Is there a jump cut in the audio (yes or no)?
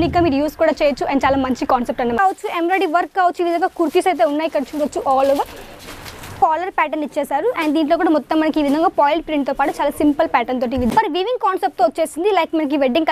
yes